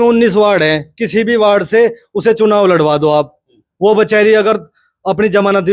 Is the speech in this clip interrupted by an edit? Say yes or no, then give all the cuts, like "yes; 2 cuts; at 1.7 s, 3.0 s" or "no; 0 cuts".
no; 0 cuts